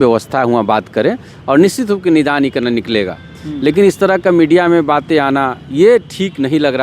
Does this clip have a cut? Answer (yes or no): no